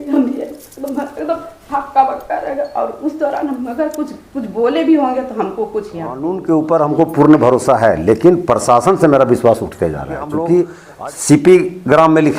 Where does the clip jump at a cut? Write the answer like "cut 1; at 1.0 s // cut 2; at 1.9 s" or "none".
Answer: cut 1; at 6.4 s // cut 2; at 10.8 s